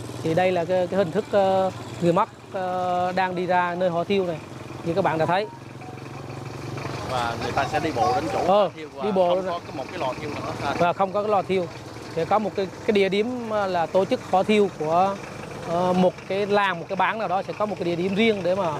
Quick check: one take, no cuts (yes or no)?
yes